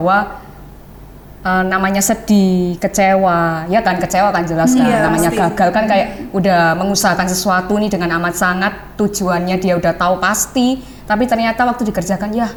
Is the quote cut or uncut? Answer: uncut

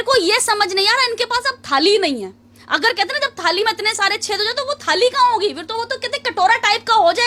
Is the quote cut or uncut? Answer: uncut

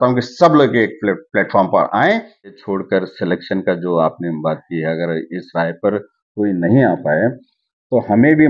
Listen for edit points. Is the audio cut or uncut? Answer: cut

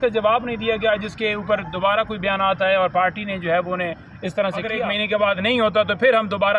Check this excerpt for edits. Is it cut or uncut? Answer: cut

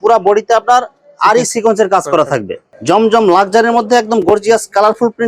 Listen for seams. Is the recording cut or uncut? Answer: cut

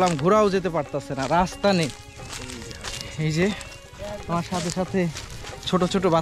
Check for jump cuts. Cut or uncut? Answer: uncut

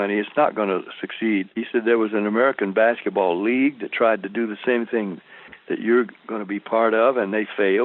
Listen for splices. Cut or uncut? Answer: cut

